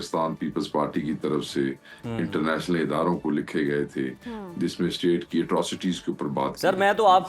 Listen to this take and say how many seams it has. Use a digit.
0